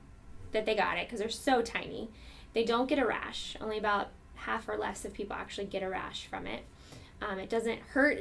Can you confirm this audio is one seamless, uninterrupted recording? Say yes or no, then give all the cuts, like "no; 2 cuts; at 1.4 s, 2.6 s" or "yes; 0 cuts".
yes; 0 cuts